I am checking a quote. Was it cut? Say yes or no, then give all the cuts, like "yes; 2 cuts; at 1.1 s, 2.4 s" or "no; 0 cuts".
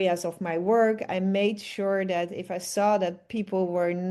no; 0 cuts